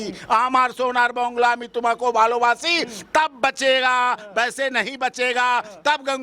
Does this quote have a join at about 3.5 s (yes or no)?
no